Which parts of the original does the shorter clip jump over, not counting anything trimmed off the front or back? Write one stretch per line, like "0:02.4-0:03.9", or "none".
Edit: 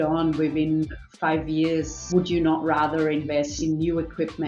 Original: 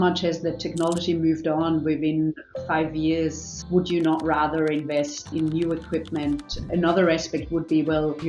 0:03.4-0:03.6
0:05.1-0:05.3